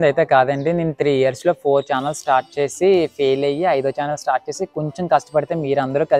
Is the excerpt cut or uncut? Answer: uncut